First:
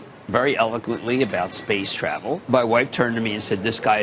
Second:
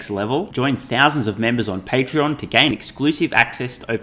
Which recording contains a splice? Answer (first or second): first